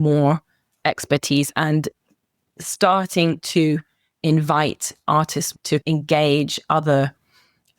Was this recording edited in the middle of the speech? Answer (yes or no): yes